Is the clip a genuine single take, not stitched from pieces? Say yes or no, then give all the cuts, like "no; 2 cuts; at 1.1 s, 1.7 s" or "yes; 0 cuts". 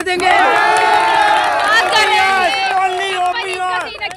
yes; 0 cuts